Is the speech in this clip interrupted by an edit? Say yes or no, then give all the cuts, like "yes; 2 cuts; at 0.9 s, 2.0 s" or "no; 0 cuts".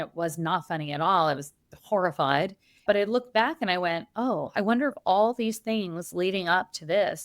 yes; 1 cut; at 2.8 s